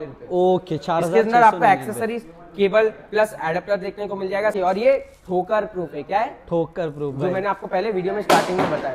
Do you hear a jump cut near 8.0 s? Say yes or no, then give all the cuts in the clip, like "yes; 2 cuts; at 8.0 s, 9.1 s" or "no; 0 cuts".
no; 1 cut; at 4.5 s